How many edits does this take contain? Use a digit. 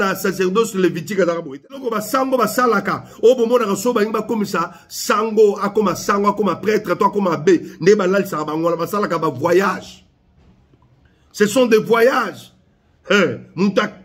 1